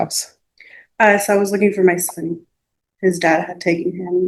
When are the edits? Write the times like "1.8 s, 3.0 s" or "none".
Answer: none